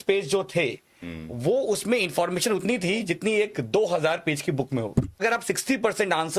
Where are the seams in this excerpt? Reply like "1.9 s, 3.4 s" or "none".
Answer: 5.2 s